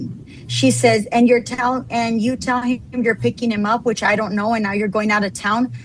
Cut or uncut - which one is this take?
uncut